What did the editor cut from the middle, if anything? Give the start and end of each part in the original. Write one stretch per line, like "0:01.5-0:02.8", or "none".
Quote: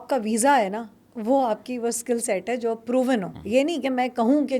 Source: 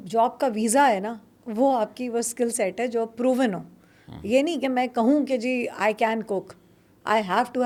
0:03.7-0:04.1